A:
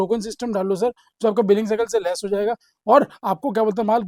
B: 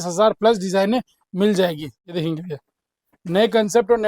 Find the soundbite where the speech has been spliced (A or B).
B